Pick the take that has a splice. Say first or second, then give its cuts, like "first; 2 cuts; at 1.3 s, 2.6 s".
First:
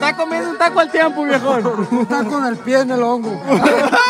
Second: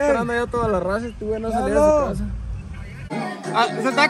second; 1 cut; at 3.0 s